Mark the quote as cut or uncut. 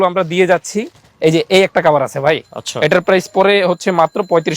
uncut